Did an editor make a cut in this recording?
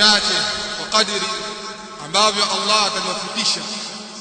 no; 0 cuts

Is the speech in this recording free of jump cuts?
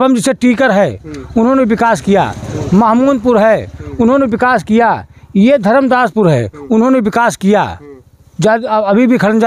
yes; 0 cuts

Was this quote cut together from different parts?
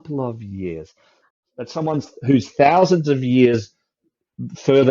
yes; 1 cut; at 1.3 s

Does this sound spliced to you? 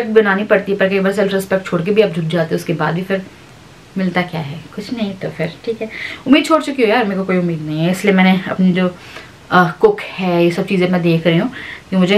no; 0 cuts

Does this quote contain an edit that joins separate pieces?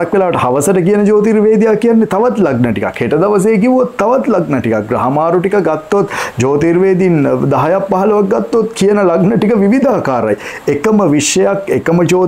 no; 0 cuts

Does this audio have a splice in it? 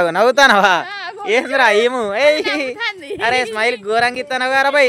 no; 0 cuts

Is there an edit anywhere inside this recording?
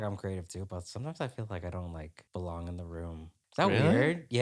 yes; 2 cuts; at 2.2 s, 3.3 s

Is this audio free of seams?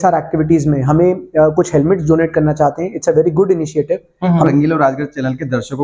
no; 1 cut; at 4.5 s

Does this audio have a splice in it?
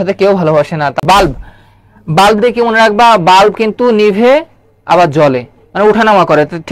yes; 1 cut; at 1.0 s

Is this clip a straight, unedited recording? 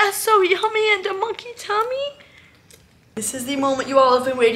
no; 1 cut; at 3.2 s

